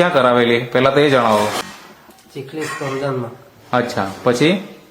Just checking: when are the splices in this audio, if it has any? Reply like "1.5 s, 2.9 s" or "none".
1.6 s